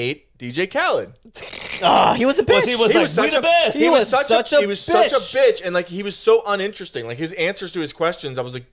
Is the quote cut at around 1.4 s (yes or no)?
no